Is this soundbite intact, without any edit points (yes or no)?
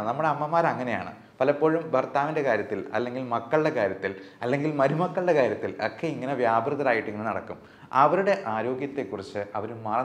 yes